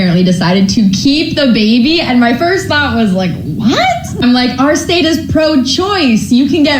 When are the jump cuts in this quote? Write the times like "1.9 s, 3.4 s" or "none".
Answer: 1.3 s, 5.3 s